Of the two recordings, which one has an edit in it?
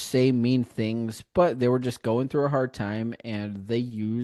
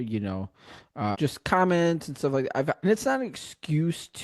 second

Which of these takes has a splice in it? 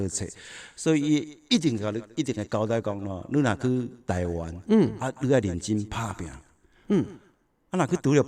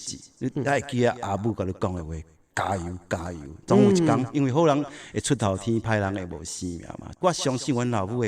second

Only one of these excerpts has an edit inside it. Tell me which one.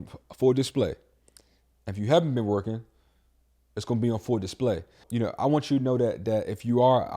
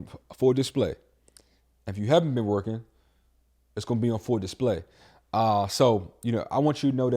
first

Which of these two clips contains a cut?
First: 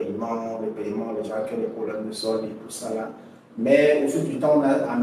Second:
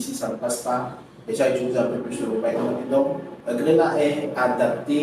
second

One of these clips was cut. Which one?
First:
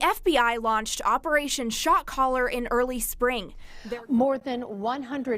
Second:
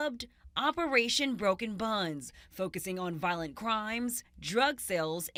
first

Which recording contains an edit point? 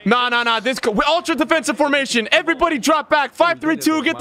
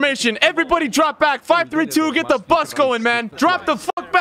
second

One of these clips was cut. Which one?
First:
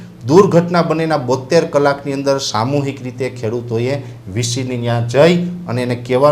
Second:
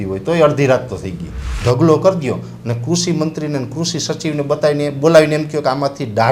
second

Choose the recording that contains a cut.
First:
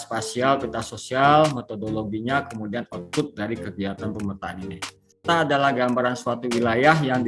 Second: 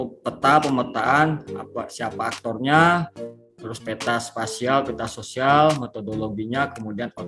first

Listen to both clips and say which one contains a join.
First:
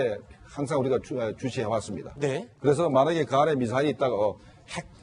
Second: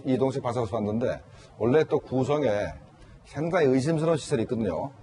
second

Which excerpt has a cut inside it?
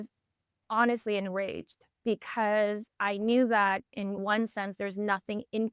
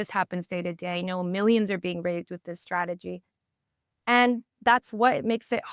first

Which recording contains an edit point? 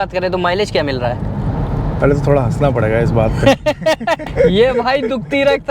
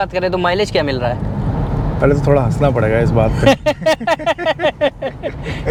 first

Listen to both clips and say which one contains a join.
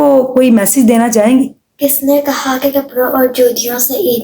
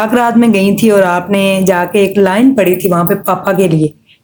first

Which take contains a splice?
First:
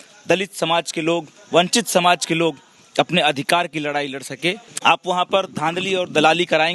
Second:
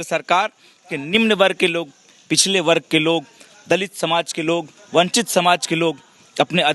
first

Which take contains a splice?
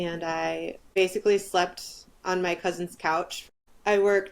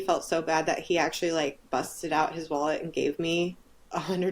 first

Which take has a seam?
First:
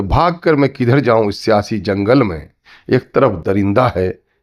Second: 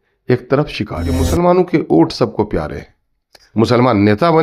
second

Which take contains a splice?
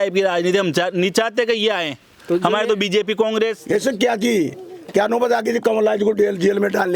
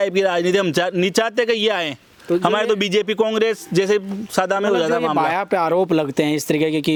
first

